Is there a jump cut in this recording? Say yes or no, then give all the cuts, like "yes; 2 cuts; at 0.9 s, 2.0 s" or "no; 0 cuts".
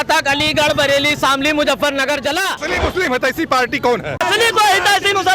yes; 2 cuts; at 2.7 s, 4.2 s